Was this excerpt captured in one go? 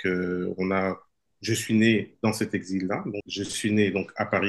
no; 1 cut; at 3.2 s

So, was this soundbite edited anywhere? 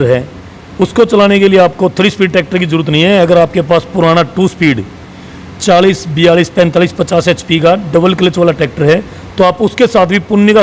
no; 0 cuts

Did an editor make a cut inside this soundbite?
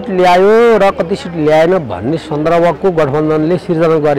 no; 0 cuts

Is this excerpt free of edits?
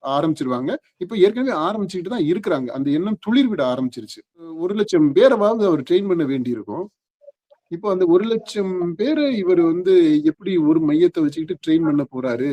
no; 1 cut; at 4.6 s

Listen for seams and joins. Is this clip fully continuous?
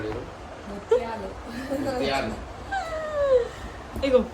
yes; 0 cuts

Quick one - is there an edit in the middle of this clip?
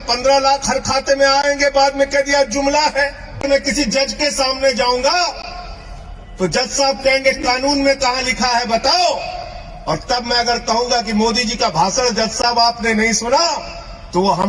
yes; 1 cut; at 3.5 s

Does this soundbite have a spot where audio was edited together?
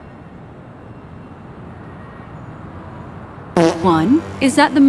yes; 1 cut; at 3.8 s

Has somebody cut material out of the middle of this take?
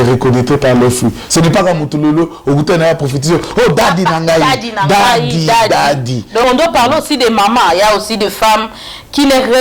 yes; 1 cut; at 6.4 s

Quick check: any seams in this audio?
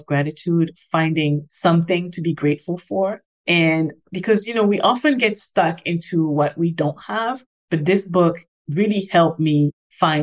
yes; 1 cut; at 1.5 s

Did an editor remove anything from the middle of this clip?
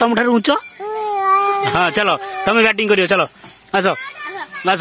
no; 0 cuts

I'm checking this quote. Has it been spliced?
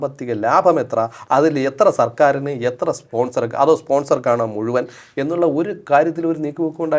no; 0 cuts

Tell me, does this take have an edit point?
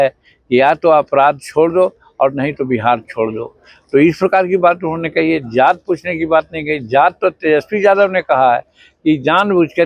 no; 0 cuts

